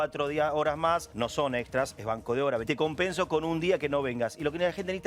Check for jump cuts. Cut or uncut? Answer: cut